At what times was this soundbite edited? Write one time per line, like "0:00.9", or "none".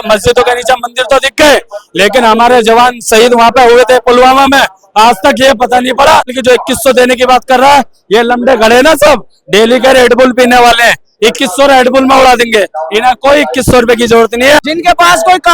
0:06.3
0:14.6